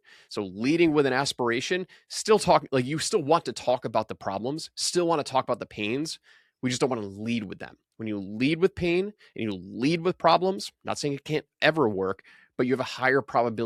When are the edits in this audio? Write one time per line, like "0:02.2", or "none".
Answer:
none

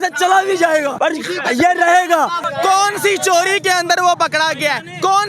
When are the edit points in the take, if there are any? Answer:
0:00.9
0:02.4

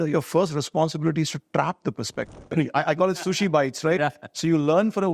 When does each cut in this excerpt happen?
0:02.5

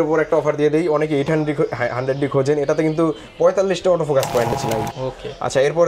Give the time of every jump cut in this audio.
0:04.5

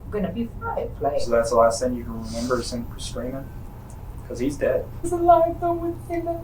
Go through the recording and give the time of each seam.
0:01.2
0:05.1

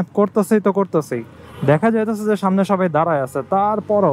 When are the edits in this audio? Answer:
none

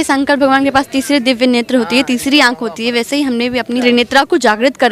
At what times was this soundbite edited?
0:03.8

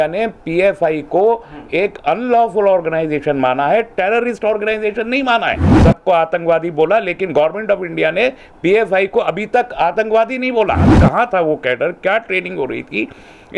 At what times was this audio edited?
0:05.7
0:10.9

